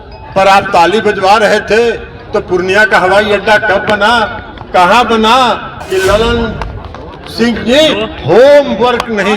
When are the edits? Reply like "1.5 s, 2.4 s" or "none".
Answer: 5.8 s